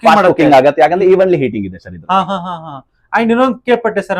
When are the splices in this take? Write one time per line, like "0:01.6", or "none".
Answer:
none